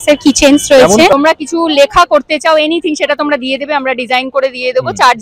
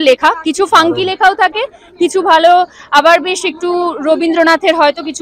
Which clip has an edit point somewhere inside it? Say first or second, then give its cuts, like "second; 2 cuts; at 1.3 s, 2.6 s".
first; 1 cut; at 1.1 s